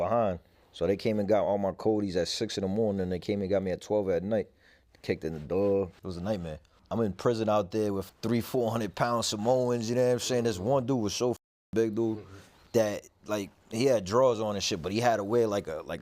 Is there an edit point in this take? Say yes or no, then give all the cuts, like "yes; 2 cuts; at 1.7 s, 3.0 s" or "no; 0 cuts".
yes; 3 cuts; at 5.9 s, 6.8 s, 8.0 s